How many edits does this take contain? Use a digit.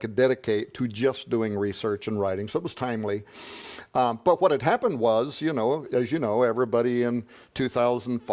1